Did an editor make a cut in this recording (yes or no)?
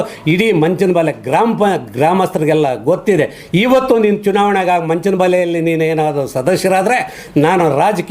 no